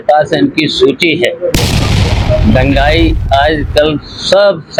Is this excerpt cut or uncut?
uncut